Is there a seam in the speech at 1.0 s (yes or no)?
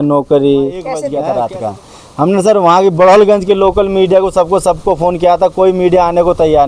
yes